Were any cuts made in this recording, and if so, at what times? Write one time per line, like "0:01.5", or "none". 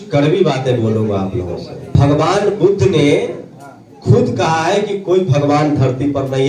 0:01.9

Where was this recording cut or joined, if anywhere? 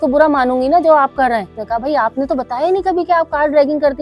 0:01.6

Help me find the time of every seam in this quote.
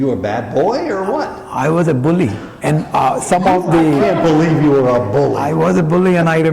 0:05.4

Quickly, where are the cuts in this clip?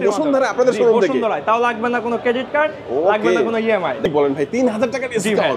0:04.0

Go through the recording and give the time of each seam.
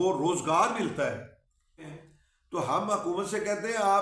0:02.0

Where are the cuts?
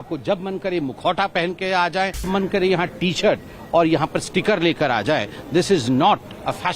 0:02.3

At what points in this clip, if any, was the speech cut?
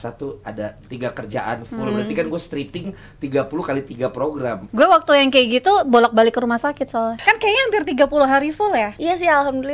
0:00.8
0:04.6
0:07.2
0:08.9

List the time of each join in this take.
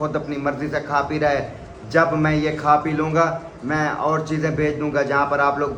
none

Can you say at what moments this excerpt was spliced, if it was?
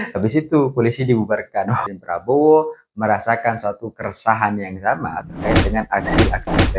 0:01.9

